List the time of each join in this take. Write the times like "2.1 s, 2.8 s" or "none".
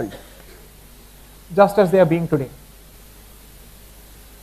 2.9 s